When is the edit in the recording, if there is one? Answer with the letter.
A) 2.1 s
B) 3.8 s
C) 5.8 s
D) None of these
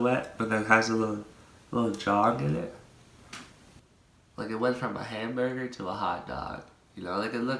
B